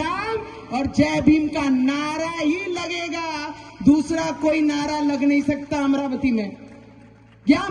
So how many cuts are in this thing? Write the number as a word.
zero